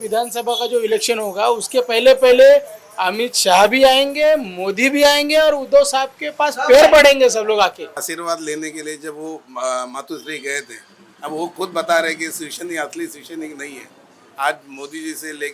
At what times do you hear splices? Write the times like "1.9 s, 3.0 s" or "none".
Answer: 8.1 s